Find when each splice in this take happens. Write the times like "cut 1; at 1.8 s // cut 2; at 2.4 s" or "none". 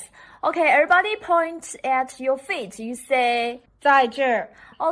cut 1; at 3.6 s